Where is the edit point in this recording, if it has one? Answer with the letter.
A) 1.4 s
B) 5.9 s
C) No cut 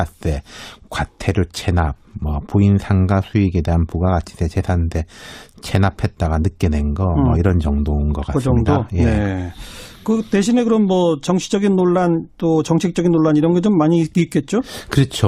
C